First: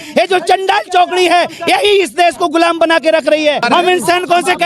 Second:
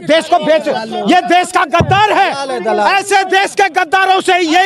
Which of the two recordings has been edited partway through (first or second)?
first